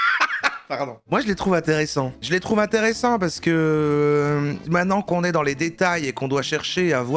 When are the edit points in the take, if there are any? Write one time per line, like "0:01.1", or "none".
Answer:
0:01.0
0:04.6